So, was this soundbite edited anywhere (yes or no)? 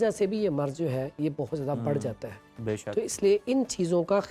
no